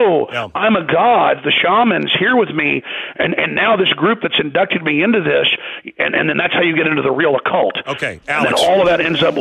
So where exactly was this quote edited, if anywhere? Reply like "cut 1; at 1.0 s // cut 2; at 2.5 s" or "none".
none